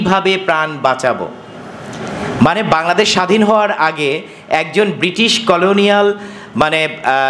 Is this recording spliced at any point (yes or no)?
no